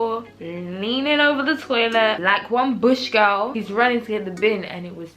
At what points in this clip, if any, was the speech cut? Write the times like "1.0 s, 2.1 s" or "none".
2.2 s, 3.5 s